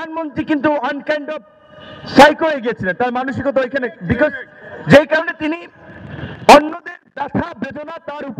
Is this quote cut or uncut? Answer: uncut